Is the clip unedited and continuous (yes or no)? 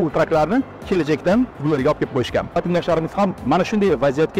no